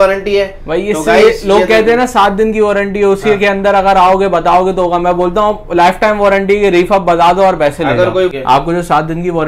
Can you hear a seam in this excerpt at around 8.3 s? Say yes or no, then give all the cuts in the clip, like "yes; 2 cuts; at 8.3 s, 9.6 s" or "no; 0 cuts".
yes; 1 cut; at 8.3 s